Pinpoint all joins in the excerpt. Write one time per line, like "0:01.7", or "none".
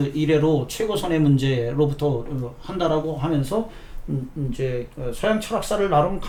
none